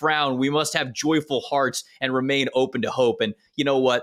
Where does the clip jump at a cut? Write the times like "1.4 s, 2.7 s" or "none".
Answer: none